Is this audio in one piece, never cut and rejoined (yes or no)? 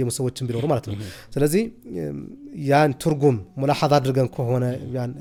yes